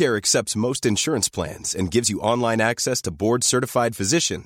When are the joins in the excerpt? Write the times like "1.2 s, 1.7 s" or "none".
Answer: none